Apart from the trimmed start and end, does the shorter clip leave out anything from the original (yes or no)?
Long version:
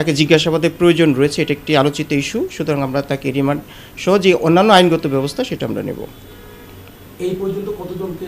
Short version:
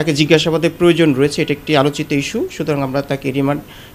no